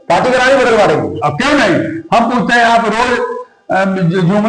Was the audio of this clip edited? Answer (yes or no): no